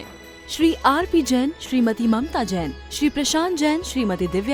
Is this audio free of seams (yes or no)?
yes